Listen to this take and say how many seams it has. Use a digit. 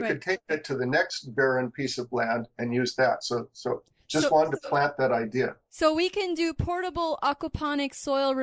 0